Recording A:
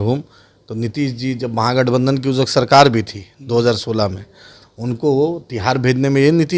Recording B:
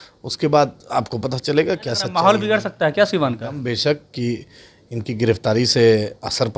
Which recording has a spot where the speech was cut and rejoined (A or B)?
B